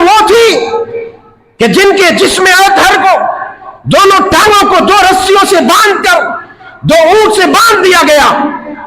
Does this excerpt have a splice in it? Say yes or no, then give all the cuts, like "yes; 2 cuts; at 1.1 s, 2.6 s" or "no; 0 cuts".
no; 0 cuts